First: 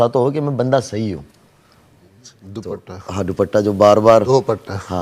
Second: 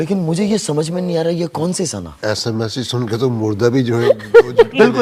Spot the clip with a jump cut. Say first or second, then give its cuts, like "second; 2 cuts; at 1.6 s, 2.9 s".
first; 1 cut; at 2.3 s